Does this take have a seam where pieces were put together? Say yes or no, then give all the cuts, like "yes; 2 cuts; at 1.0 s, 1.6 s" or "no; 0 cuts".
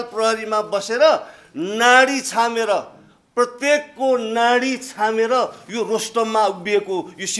no; 0 cuts